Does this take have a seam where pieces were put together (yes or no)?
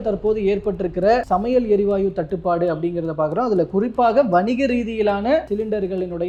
no